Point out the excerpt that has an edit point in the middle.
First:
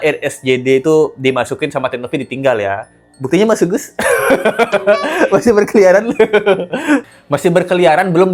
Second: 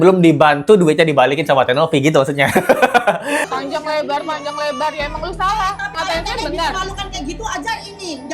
second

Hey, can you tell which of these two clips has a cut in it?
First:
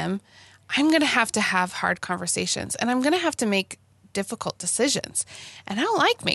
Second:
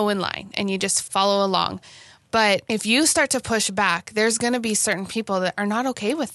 second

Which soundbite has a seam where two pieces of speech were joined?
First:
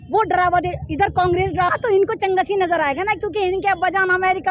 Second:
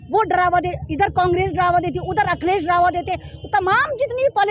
first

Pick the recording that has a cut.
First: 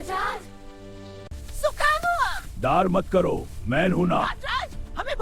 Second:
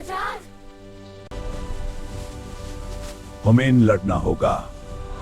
second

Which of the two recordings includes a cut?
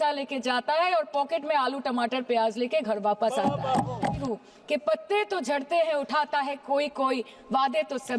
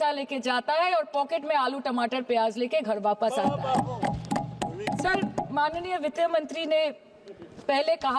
first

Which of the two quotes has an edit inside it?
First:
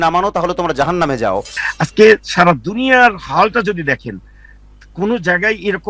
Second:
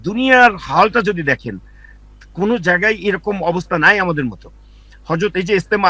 first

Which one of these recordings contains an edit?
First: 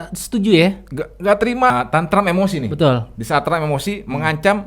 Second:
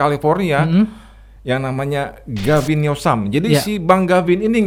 first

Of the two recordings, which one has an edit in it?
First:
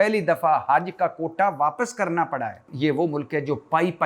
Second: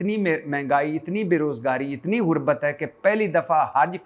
first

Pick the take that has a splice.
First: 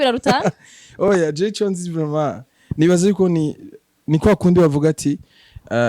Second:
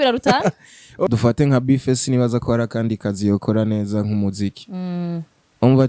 second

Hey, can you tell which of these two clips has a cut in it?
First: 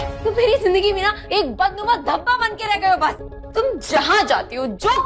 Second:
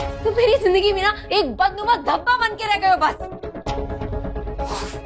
first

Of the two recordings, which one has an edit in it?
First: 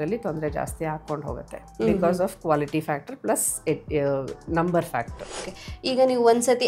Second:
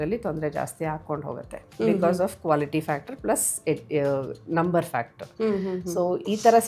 first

